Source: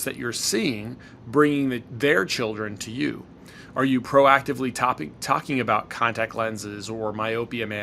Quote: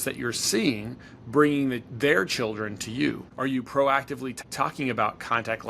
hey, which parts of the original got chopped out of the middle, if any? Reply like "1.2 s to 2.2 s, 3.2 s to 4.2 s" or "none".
3.3 s to 3.6 s, 4.8 s to 5.1 s